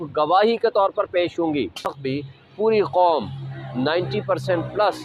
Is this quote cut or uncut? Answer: cut